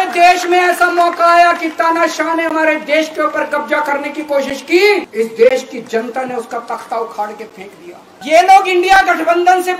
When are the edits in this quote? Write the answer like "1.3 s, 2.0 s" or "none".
5.1 s, 8.1 s